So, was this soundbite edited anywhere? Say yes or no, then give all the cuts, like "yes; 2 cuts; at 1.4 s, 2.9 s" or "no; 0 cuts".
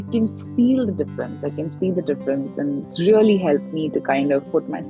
yes; 1 cut; at 2.9 s